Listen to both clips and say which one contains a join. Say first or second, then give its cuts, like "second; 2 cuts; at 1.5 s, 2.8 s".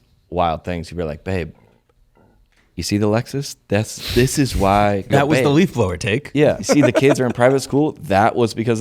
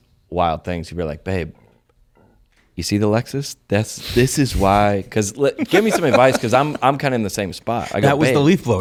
first; 2 cuts; at 5.0 s, 6.7 s